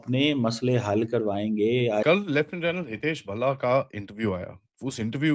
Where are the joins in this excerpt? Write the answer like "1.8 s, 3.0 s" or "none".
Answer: 2.0 s